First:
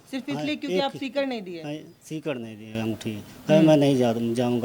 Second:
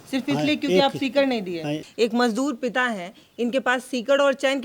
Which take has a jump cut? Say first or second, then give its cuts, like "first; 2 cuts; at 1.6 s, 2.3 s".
second; 1 cut; at 1.8 s